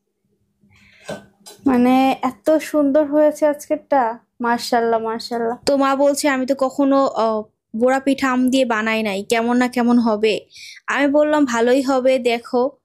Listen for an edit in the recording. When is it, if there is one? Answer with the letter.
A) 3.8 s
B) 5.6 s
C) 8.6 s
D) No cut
B